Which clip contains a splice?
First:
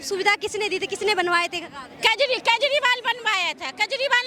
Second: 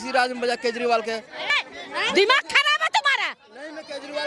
second; 1 cut; at 1.5 s

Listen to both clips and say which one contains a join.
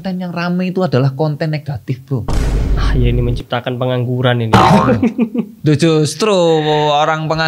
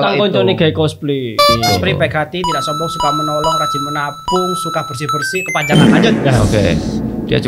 second; 1 cut; at 1.6 s

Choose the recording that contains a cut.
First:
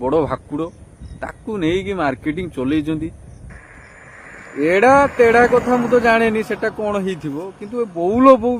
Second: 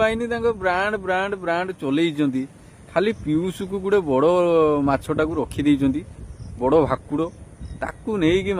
first; 1 cut; at 3.5 s

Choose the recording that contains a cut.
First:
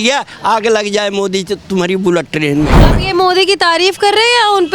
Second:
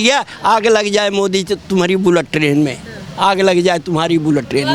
first; 1 cut; at 2.9 s

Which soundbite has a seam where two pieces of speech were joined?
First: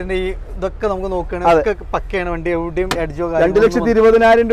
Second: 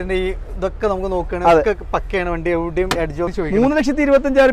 second; 1 cut; at 3.3 s

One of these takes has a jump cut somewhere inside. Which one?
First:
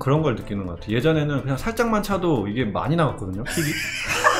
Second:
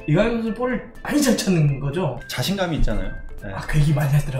second; 1 cut; at 2.2 s

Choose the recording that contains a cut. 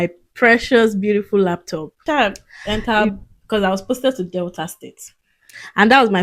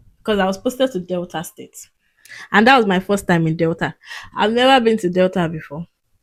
first; 1 cut; at 2.0 s

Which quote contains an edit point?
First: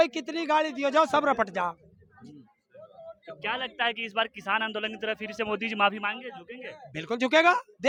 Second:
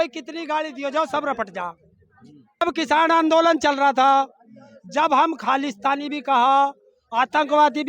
second; 1 cut; at 2.6 s

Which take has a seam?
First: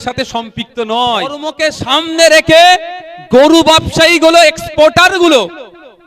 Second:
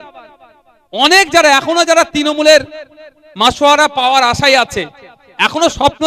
first; 1 cut; at 1.5 s

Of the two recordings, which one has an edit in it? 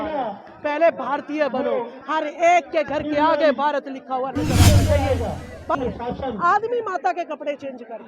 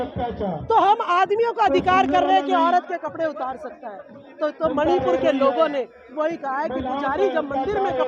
first; 1 cut; at 5.7 s

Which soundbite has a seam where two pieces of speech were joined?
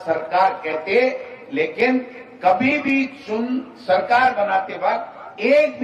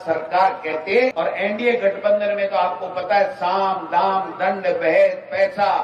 second; 1 cut; at 1.1 s

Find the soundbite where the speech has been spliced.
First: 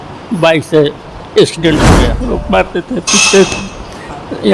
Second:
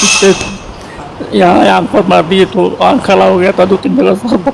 first; 1 cut; at 2.1 s

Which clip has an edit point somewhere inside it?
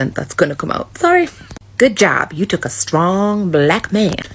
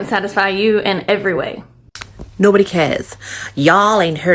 second; 1 cut; at 2.0 s

